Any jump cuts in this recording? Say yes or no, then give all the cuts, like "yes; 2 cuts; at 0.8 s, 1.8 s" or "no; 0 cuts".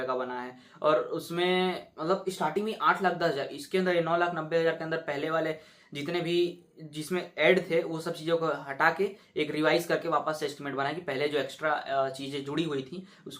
no; 0 cuts